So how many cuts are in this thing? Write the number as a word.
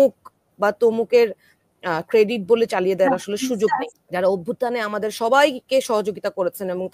one